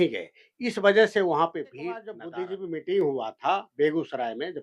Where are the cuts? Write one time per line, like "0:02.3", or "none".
0:02.2